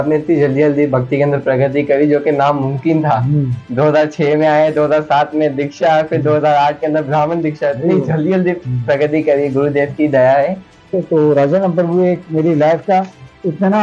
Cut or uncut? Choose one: cut